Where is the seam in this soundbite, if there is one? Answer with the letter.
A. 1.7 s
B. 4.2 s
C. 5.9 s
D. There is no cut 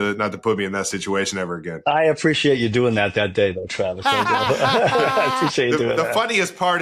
A